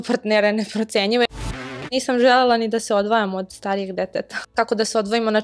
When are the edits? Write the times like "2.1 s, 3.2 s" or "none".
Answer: 1.4 s, 4.4 s